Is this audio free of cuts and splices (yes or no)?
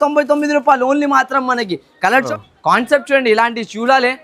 no